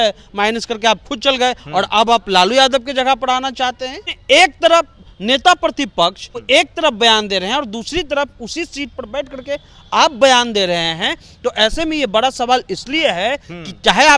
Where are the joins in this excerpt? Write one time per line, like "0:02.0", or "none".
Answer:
0:04.1